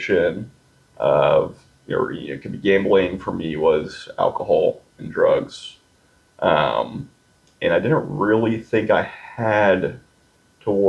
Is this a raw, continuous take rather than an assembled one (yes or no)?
yes